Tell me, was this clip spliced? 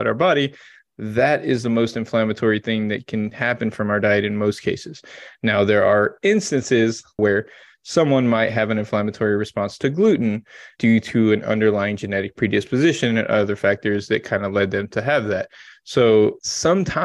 yes; 2 cuts; at 7.2 s, 10.6 s

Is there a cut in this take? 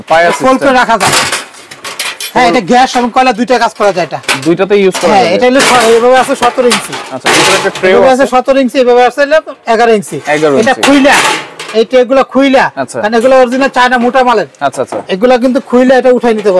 no; 0 cuts

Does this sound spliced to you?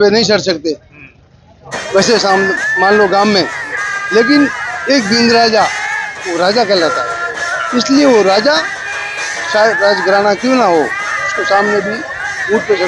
no; 0 cuts

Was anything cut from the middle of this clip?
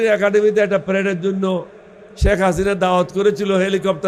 no; 0 cuts

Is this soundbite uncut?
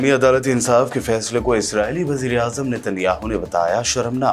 yes; 0 cuts

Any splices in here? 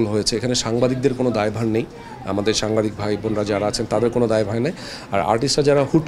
no; 0 cuts

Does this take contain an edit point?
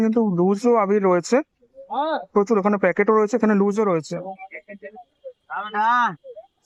no; 0 cuts

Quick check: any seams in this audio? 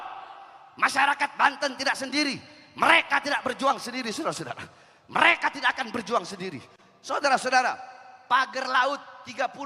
no; 0 cuts

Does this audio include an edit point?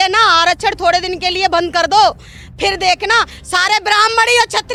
no; 0 cuts

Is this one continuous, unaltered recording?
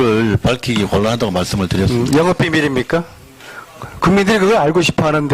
no; 1 cut; at 1.3 s

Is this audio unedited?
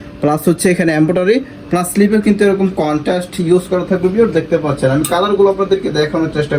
yes; 0 cuts

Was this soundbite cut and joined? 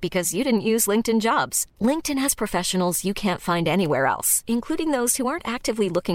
no; 0 cuts

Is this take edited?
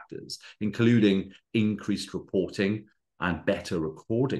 no; 0 cuts

